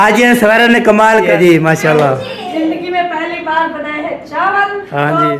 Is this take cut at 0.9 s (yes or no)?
yes